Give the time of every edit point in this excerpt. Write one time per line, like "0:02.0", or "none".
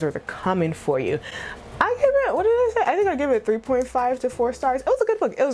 none